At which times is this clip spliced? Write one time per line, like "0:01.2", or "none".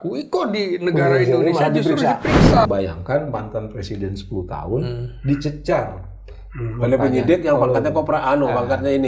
0:02.6